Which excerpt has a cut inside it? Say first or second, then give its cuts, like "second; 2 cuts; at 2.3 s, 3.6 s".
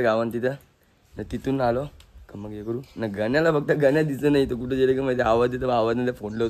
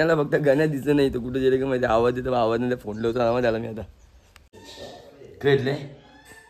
second; 1 cut; at 4.5 s